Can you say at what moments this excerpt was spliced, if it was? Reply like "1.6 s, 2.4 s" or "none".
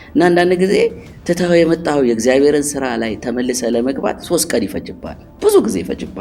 none